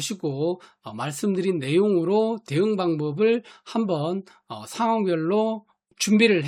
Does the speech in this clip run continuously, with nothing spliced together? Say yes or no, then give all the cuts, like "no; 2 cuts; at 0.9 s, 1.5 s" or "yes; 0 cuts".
yes; 0 cuts